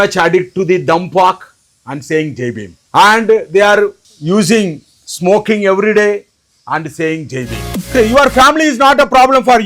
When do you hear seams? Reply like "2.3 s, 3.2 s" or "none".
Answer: 2.7 s, 4.1 s, 7.7 s